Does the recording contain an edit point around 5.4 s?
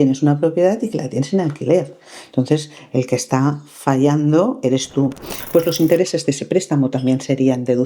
yes; 1 cut; at 5.4 s

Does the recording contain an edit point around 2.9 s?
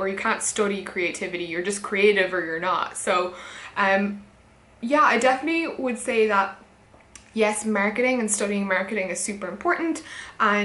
no; 0 cuts

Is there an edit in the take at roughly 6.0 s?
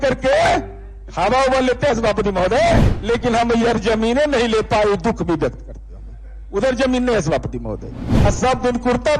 no; 2 cuts; at 2.9 s, 8.1 s

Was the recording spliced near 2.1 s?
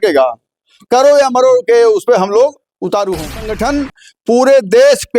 no; 1 cut; at 3.5 s

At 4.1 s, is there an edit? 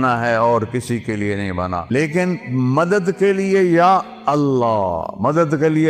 no; 1 cut; at 1.9 s

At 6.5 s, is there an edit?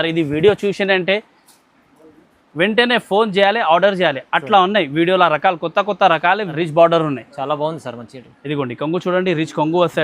yes; 1 cut; at 6.5 s

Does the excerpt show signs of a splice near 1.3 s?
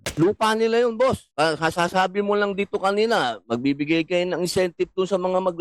yes; 1 cut; at 1.3 s

